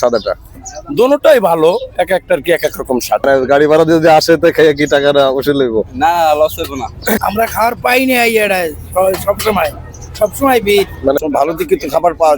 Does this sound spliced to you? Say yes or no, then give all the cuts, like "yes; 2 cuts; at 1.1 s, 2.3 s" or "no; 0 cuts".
yes; 3 cuts; at 3.2 s, 7.2 s, 11.2 s